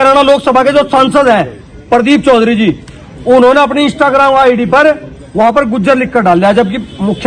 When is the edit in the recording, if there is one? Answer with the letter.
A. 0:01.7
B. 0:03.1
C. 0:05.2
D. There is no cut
D